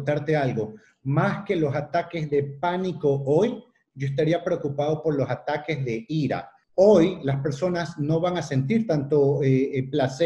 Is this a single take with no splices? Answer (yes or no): no